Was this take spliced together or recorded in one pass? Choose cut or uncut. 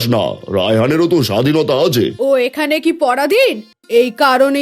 cut